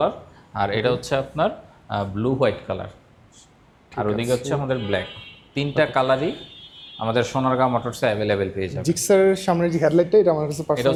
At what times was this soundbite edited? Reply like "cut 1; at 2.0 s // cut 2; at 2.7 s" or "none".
none